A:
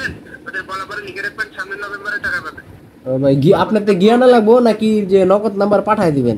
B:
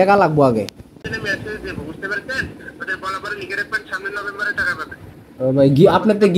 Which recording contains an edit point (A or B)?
B